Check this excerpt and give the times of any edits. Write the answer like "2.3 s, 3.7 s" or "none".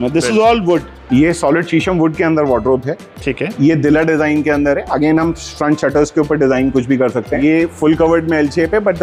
1.0 s, 7.4 s